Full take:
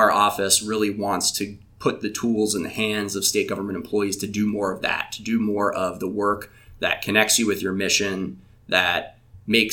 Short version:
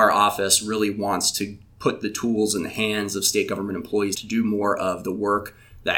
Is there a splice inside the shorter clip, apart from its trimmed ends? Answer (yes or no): yes